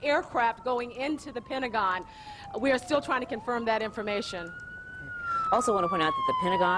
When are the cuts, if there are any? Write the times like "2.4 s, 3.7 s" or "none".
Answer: none

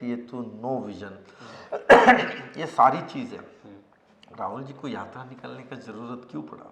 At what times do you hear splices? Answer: none

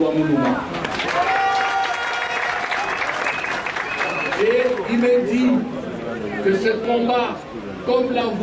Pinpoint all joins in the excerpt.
none

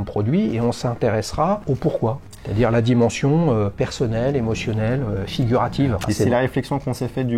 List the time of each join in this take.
1.6 s, 3.7 s, 6.0 s

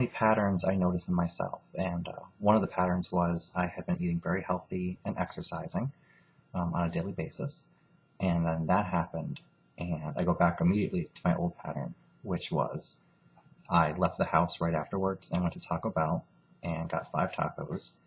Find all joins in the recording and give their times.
8.3 s

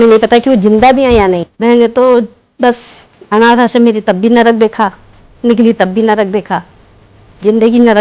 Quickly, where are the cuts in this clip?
1.5 s

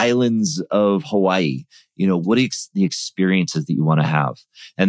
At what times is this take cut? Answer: 2.2 s

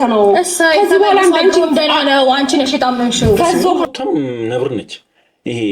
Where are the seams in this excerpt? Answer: 3.8 s

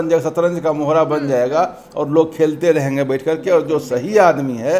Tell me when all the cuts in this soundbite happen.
none

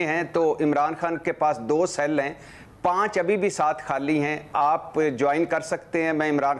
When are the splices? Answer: none

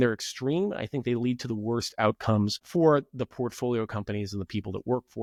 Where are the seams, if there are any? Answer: none

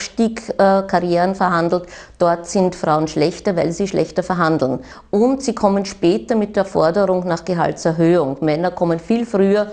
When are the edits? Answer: 4.9 s

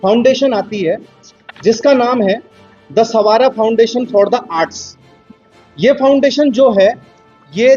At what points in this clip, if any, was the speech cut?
none

